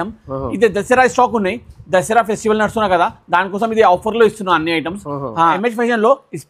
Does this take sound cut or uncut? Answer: cut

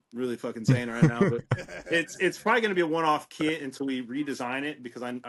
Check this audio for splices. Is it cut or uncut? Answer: uncut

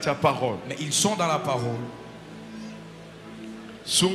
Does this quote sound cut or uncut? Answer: uncut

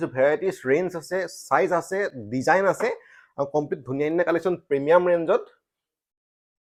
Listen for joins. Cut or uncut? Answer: uncut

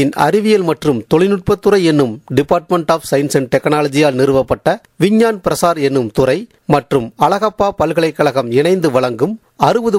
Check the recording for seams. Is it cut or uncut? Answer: uncut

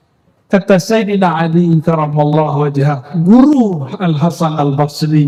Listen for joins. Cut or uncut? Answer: uncut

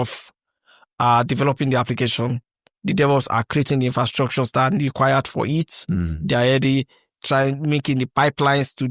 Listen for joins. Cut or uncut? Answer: uncut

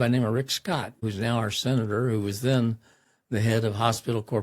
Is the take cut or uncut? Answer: cut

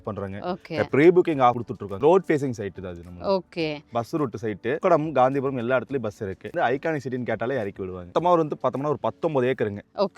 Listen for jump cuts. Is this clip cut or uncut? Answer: cut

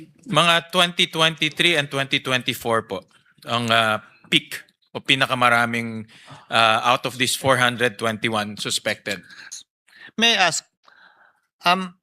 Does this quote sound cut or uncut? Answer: cut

